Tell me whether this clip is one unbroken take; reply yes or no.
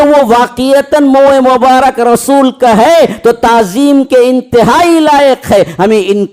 yes